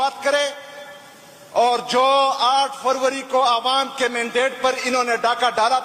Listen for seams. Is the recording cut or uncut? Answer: uncut